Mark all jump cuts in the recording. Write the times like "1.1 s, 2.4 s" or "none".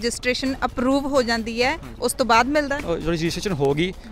2.8 s